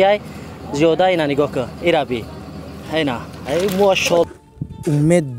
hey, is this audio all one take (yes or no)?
no